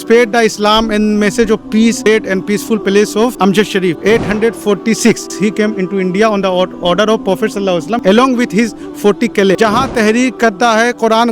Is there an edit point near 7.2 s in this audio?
no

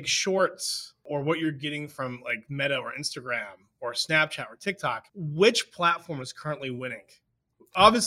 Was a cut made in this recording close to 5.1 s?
yes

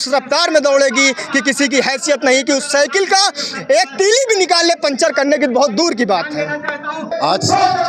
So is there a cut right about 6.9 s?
no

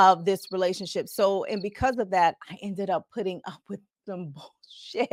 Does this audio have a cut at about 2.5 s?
no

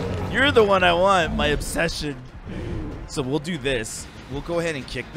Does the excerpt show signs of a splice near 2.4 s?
no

